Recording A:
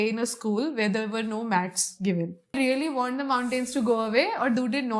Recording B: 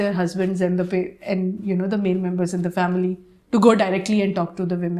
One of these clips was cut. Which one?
A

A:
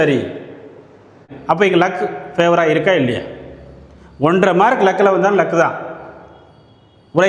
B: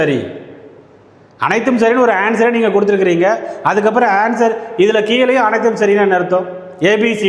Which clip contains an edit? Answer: A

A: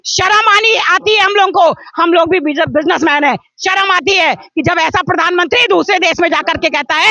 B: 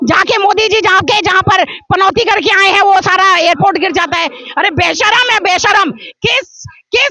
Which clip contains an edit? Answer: B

